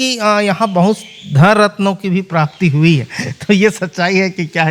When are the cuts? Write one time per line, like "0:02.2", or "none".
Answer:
none